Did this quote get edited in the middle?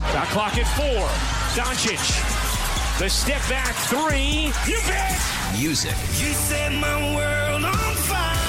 no; 0 cuts

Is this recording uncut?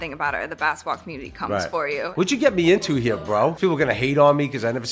no; 2 cuts; at 2.1 s, 3.6 s

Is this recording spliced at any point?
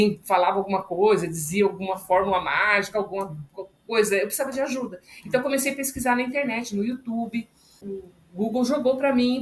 yes; 1 cut; at 7.9 s

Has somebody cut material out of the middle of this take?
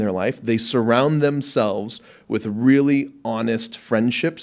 no; 0 cuts

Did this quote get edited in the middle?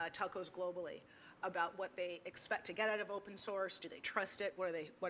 no; 0 cuts

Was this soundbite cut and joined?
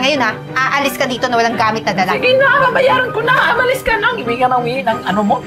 no; 0 cuts

